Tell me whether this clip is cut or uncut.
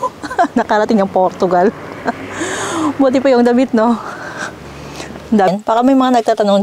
cut